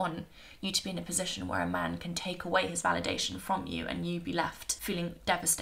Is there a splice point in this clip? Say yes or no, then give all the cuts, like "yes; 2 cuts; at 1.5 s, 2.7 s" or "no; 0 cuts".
yes; 1 cut; at 4.7 s